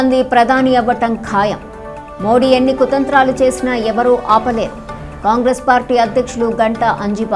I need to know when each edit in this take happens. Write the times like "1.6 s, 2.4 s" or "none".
none